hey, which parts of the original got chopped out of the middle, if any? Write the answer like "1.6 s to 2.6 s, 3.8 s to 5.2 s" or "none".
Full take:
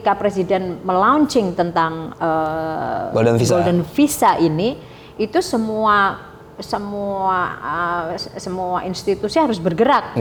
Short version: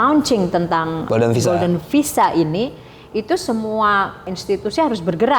2.1 s to 3.1 s, 6.4 s to 8.9 s